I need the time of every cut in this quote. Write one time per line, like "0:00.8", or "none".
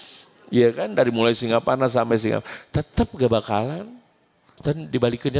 0:04.5